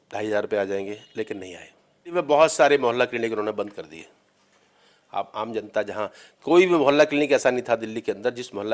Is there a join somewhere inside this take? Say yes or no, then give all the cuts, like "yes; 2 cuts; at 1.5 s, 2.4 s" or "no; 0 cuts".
yes; 1 cut; at 2.1 s